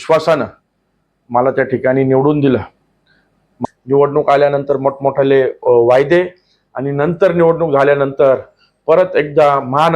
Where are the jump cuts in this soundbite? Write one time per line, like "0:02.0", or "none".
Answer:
0:03.5

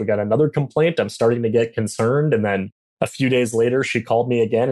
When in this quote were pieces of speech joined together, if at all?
none

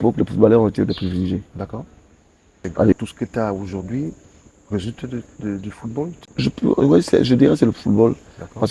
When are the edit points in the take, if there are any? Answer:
0:02.9
0:06.2

